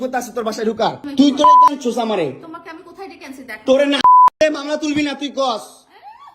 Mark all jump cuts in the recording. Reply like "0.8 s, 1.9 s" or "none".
1.0 s